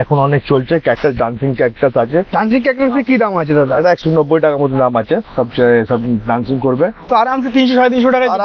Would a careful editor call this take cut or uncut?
uncut